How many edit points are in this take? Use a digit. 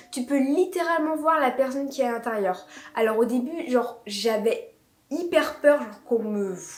0